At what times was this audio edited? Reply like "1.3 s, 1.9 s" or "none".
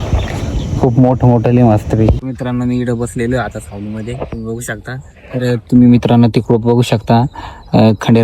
2.1 s